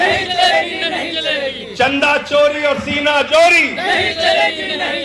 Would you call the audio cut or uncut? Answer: uncut